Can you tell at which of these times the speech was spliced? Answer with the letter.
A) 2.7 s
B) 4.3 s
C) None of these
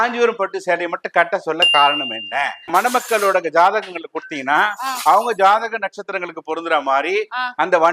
A